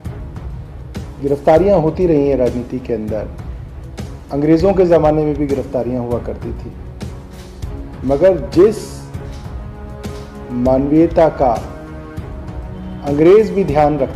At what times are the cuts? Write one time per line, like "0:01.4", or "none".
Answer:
0:00.9
0:08.9
0:10.5